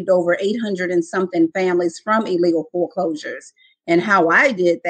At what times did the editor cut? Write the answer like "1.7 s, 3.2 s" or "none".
none